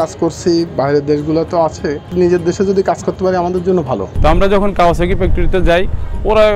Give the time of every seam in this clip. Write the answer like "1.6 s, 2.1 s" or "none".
2.1 s, 4.1 s